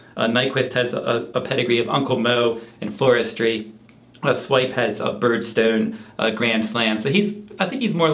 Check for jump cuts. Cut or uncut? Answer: cut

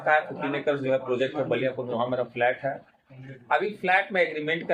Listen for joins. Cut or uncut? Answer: uncut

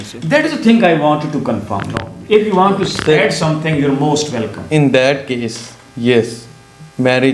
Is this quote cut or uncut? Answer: cut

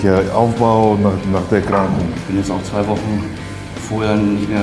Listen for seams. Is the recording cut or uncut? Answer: cut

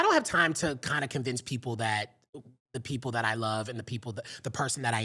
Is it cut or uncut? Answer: uncut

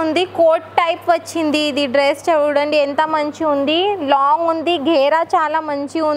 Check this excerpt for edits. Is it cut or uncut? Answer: uncut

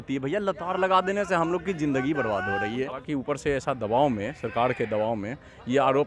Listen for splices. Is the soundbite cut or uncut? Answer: cut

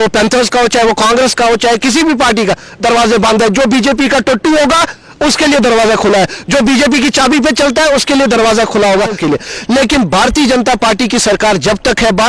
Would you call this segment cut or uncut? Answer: cut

